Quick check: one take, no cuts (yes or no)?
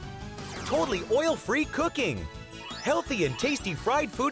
yes